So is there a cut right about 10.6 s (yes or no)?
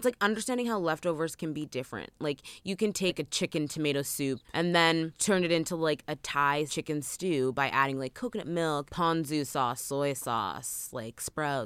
no